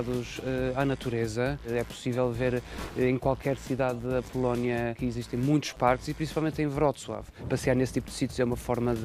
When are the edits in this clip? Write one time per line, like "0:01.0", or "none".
0:01.7
0:05.0
0:07.4